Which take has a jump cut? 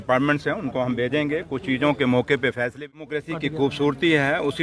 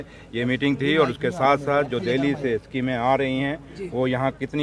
first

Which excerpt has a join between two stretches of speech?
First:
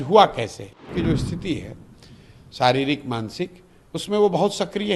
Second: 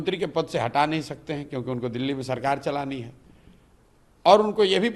first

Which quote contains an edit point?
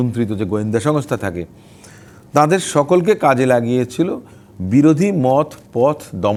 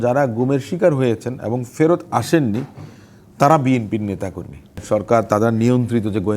second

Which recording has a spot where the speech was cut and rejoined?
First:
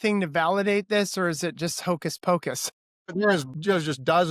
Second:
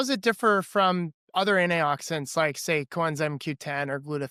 first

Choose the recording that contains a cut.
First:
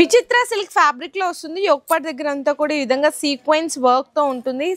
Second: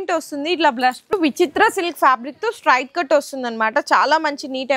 second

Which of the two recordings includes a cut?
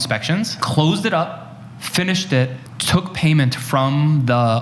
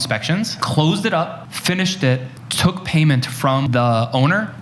second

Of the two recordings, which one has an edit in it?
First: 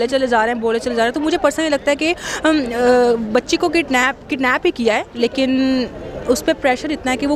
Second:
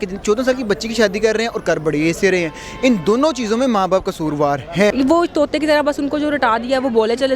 second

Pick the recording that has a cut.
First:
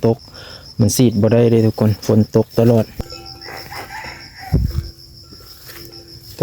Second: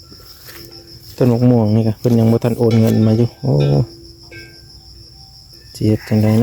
first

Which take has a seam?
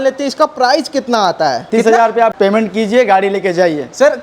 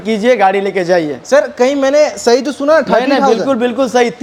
first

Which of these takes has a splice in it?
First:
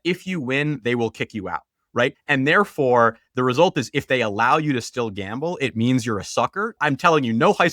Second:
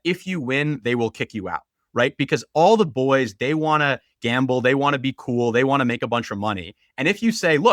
first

